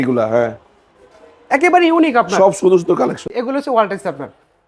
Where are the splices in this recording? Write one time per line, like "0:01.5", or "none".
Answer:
0:03.3